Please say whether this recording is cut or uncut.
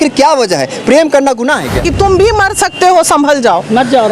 cut